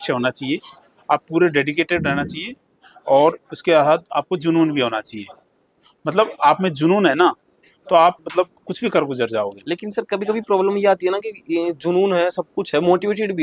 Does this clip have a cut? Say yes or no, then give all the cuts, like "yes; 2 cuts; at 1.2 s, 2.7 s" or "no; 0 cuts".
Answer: no; 0 cuts